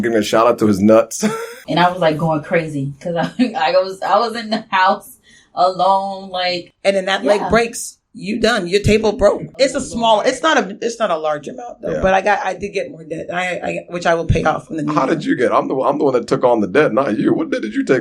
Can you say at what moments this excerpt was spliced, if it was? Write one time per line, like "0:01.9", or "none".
0:01.6
0:06.7
0:09.5